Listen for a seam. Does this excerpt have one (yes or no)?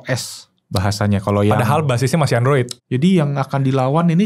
yes